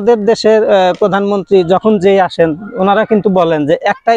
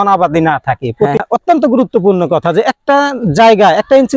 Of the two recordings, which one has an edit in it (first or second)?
second